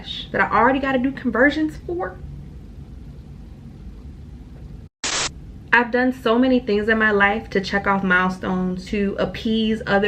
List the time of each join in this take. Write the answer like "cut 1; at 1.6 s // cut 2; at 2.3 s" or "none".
cut 1; at 5.3 s // cut 2; at 8.8 s